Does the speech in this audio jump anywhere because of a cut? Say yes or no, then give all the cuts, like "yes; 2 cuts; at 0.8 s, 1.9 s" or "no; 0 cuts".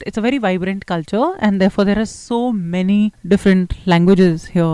yes; 1 cut; at 3.2 s